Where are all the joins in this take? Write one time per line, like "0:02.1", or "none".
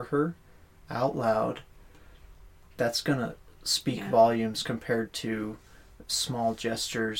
none